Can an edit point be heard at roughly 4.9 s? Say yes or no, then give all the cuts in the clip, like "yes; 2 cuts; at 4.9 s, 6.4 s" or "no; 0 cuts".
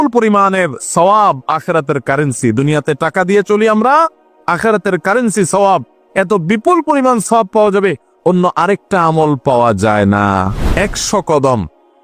no; 1 cut; at 10.5 s